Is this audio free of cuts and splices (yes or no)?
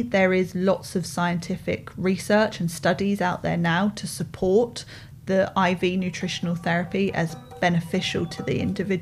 yes